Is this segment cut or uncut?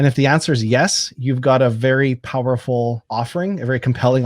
cut